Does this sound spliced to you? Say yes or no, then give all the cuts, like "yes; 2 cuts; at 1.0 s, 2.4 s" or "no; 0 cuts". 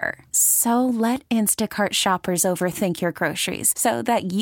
no; 0 cuts